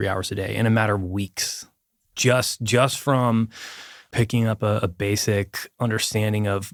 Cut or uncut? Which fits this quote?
uncut